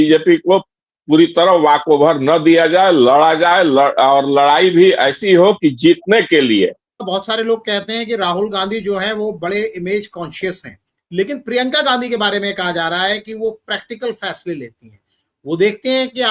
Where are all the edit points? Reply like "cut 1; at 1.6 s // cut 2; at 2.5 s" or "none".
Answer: none

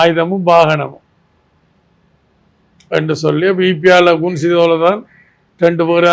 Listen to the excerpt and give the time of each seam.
none

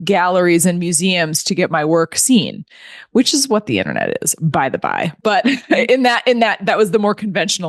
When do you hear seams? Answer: none

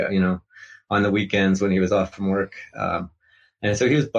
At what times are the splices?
none

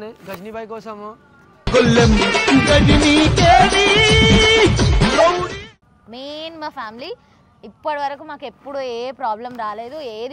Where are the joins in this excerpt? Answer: cut 1; at 5.4 s

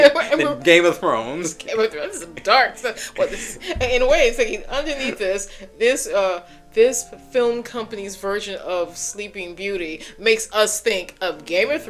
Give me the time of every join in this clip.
none

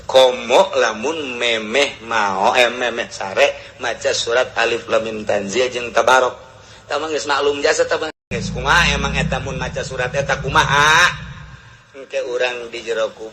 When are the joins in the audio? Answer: cut 1; at 8.3 s

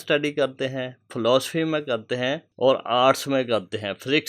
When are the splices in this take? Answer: cut 1; at 2.5 s

